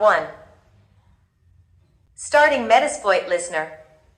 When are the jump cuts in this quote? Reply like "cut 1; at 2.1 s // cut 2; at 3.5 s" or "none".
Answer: cut 1; at 2.0 s

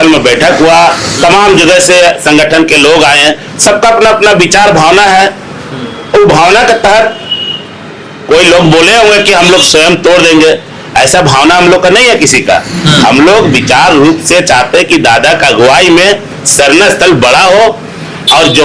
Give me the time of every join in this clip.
none

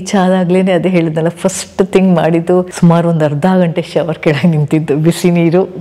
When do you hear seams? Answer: none

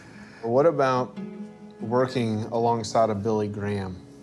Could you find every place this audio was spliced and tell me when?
cut 1; at 3.0 s

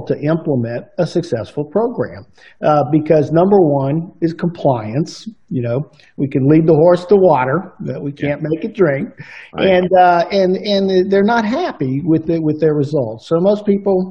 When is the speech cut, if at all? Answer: none

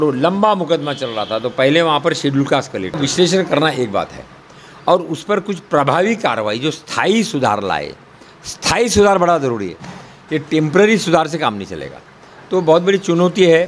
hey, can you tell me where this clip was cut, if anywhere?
cut 1; at 3.0 s

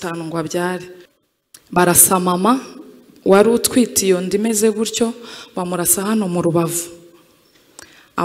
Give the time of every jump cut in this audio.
cut 1; at 1.0 s

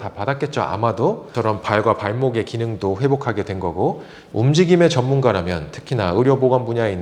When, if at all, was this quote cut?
cut 1; at 1.3 s // cut 2; at 4.1 s

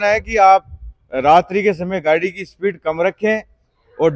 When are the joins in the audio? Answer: none

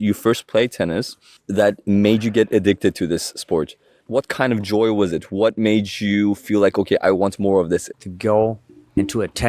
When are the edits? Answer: cut 1; at 7.9 s

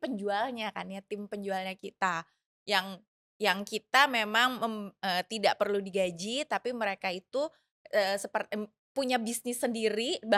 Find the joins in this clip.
none

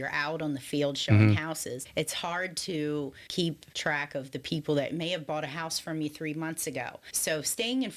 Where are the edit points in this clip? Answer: cut 1; at 1.8 s // cut 2; at 3.5 s // cut 3; at 7.0 s

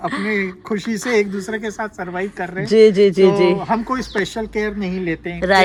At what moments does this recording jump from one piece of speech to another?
none

